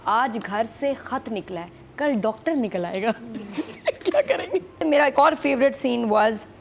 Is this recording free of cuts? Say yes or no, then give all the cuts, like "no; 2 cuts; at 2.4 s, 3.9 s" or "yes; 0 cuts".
no; 1 cut; at 4.8 s